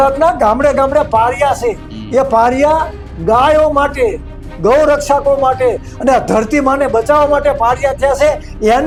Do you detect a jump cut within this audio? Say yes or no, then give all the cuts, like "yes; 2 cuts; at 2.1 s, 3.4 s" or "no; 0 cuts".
no; 0 cuts